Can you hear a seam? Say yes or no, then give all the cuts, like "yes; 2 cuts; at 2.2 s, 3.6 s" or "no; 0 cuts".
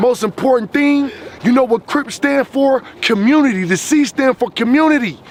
no; 0 cuts